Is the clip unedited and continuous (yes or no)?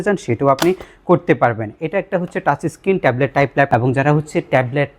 no